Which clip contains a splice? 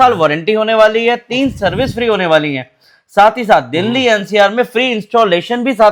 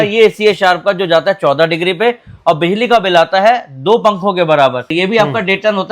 second; 1 cut; at 4.9 s

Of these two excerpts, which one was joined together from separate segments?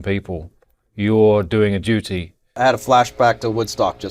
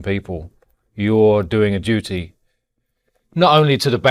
first; 1 cut; at 2.6 s

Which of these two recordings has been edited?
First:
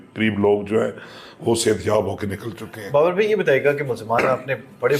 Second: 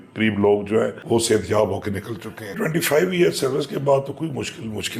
second; 2 cuts; at 1.0 s, 2.5 s

